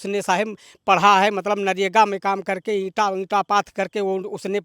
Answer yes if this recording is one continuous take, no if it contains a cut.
yes